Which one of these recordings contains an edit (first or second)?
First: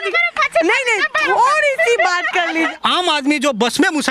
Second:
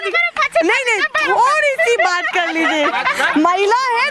first